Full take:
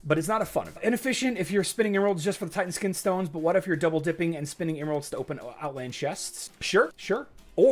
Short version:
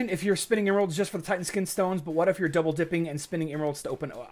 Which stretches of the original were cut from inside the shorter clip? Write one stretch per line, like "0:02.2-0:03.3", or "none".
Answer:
none